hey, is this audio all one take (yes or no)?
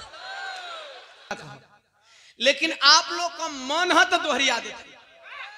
no